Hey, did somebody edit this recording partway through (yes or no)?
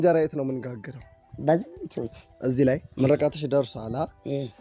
no